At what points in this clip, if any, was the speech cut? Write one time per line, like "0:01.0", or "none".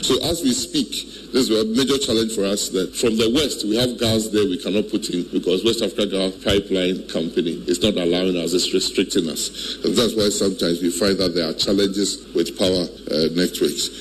0:02.9
0:05.3
0:06.4
0:07.6
0:12.5